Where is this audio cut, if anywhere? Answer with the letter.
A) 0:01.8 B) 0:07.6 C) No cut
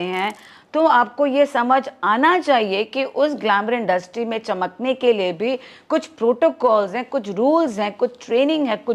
C